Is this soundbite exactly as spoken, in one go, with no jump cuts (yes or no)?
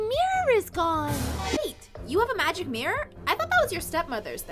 no